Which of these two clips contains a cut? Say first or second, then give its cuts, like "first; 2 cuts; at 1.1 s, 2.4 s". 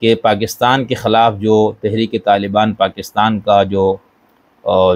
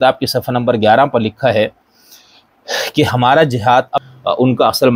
second; 1 cut; at 4.0 s